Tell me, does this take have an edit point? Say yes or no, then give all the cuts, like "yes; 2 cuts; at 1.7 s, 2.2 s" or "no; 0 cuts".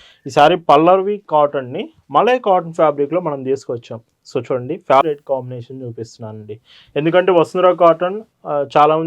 yes; 1 cut; at 5.0 s